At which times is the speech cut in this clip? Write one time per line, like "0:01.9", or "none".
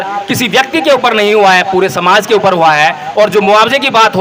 none